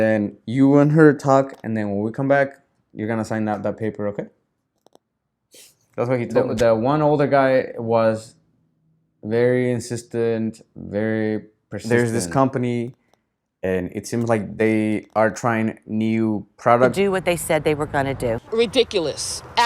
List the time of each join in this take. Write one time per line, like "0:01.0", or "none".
0:06.3
0:11.7
0:16.9